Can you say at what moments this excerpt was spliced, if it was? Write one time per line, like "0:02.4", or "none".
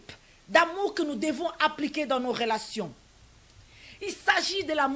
none